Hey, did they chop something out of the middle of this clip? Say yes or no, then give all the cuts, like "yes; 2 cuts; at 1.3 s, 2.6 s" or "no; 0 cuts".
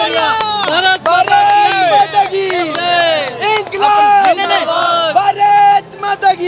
no; 0 cuts